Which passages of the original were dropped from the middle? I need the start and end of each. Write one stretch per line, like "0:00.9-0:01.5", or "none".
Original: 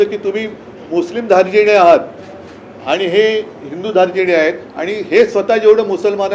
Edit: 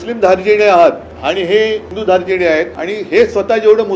0:02.2-0:02.7
0:03.5-0:03.8
0:04.6-0:04.8